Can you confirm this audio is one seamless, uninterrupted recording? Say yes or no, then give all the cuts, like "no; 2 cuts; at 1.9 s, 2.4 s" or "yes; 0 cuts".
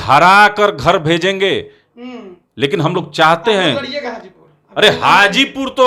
yes; 0 cuts